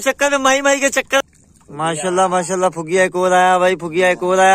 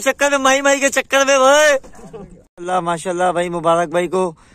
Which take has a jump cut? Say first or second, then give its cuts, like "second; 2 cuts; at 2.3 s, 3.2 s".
first; 1 cut; at 1.2 s